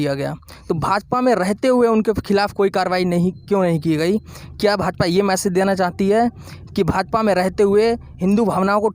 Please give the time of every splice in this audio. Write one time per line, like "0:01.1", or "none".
none